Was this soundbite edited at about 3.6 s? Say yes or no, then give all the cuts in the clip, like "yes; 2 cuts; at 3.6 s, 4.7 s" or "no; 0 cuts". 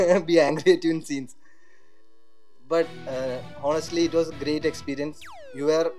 no; 0 cuts